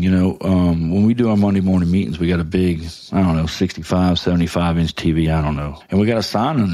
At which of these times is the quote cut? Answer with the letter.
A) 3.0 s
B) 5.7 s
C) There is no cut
B